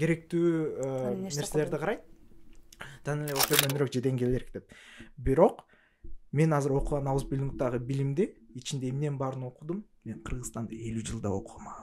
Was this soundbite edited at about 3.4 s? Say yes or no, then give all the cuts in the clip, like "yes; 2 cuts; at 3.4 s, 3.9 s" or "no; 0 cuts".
yes; 1 cut; at 3.4 s